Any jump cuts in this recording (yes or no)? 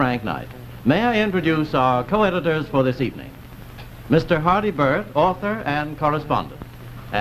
no